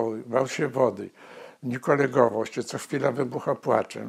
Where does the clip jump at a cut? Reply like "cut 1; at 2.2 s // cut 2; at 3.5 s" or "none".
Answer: none